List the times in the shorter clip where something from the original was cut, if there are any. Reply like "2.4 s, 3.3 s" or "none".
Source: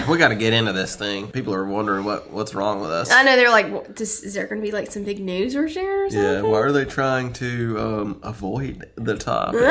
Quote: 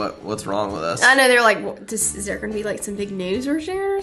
none

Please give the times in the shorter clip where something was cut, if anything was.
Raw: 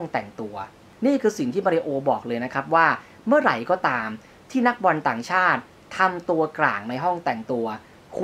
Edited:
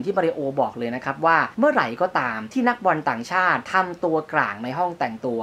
1.5 s, 2.4 s, 3.7 s

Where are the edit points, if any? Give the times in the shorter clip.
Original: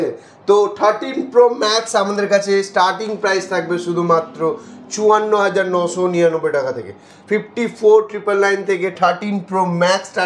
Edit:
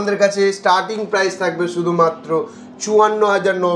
none

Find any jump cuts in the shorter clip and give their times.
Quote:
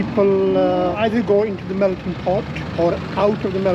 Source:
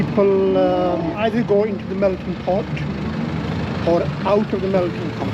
1.0 s, 2.6 s

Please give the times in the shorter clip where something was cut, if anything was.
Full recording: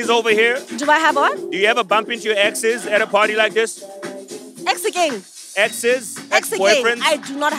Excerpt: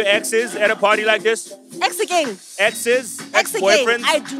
1.6 s, 2.4 s

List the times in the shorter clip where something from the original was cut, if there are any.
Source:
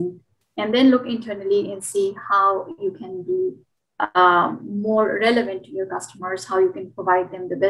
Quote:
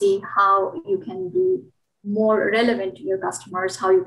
1.9 s

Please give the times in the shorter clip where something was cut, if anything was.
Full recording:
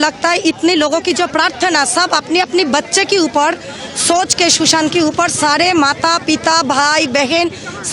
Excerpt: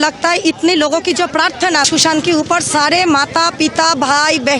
1.9 s

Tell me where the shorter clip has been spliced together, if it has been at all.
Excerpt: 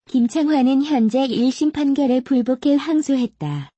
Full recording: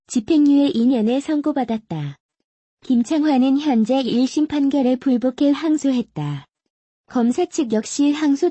none

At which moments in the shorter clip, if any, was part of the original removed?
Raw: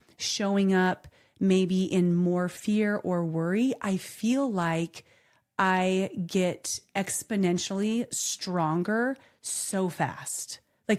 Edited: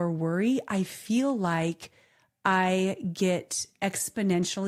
none

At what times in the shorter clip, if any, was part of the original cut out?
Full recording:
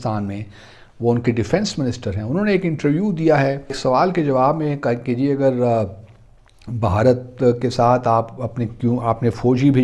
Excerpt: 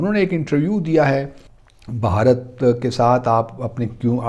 1.4 s

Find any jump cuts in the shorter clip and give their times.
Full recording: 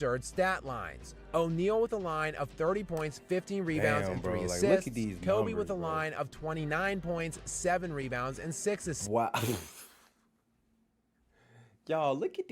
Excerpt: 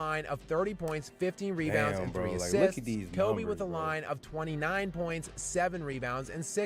none

